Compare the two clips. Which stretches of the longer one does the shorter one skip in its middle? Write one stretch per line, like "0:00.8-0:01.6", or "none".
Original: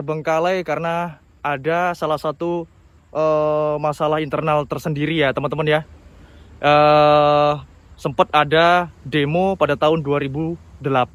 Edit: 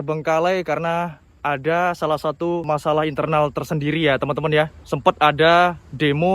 0:02.7-0:03.8
0:06.0-0:08.0